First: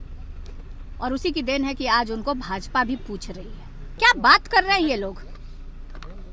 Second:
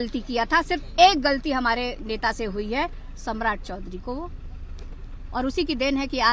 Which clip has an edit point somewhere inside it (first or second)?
first